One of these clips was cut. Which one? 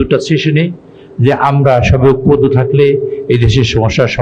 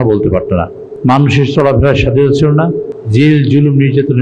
second; 1 cut; at 2.9 s

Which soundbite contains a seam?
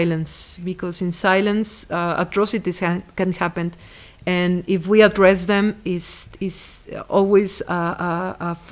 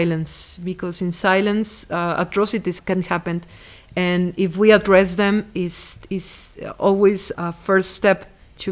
second; 2 cuts; at 2.8 s, 7.3 s

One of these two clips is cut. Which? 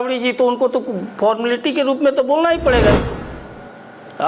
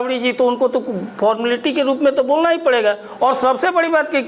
first; 1 cut; at 3.1 s

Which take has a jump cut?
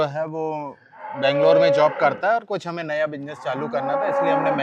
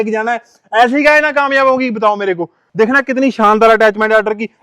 second; 1 cut; at 2.6 s

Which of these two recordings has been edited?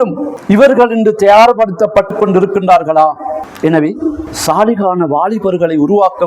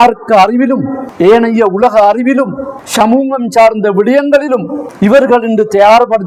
first; 1 cut; at 3.4 s

